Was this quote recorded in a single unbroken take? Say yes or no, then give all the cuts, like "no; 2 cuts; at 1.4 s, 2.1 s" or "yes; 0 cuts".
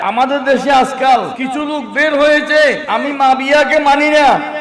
no; 2 cuts; at 1.4 s, 2.8 s